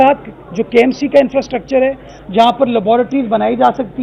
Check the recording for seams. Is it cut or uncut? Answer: uncut